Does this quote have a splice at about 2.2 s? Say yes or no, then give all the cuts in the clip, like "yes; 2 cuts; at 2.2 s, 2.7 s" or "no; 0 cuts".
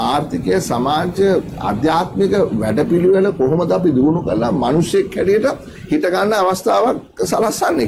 no; 0 cuts